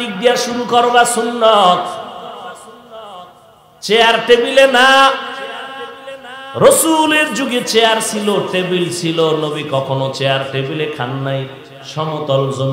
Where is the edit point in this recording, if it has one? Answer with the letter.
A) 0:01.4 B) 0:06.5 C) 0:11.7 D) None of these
D